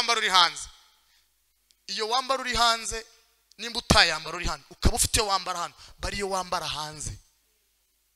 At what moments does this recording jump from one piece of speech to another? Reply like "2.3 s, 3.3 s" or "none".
none